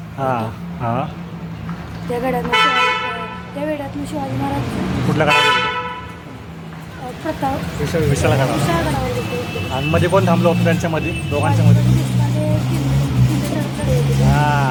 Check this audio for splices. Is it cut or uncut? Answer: uncut